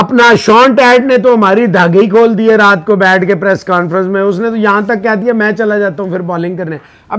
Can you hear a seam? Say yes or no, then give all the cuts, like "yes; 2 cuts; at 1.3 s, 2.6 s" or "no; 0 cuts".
no; 0 cuts